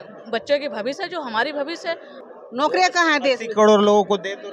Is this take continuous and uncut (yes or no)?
no